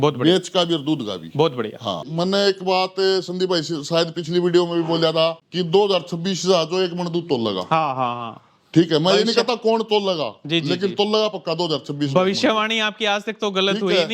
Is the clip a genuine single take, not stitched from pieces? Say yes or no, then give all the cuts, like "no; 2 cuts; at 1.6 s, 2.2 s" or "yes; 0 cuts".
no; 2 cuts; at 2.1 s, 5.5 s